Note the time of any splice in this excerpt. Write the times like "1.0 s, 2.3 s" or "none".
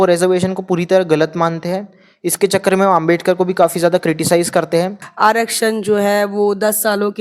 5.0 s